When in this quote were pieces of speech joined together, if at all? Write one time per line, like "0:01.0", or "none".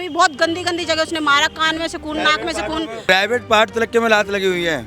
0:03.1